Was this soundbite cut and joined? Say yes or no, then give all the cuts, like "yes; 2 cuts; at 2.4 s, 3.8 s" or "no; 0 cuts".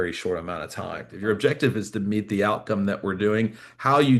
yes; 1 cut; at 1.1 s